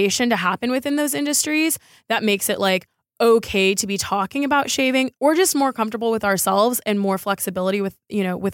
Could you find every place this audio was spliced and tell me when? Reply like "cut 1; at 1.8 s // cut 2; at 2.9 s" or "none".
cut 1; at 5.1 s